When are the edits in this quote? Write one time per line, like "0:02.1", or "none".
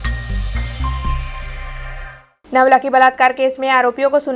0:02.0